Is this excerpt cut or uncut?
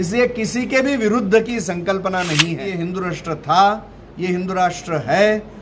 cut